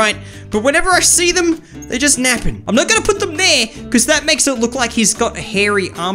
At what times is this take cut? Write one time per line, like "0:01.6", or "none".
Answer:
0:02.6